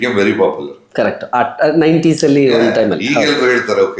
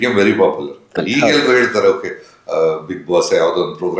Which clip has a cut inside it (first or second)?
second